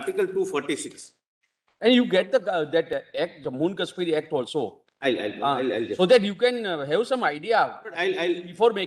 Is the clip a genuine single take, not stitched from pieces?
yes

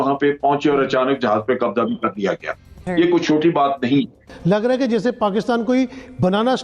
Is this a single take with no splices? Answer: no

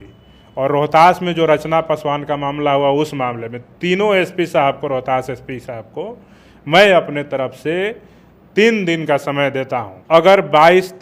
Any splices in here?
yes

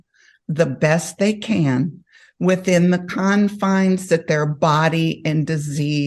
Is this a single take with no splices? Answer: yes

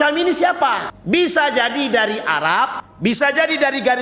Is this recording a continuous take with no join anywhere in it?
no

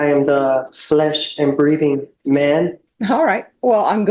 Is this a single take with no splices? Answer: no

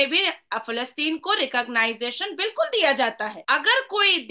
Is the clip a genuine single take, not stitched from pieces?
no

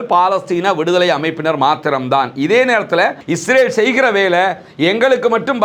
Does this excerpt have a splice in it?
yes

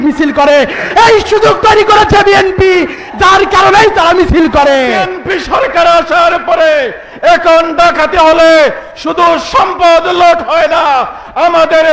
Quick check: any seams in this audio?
yes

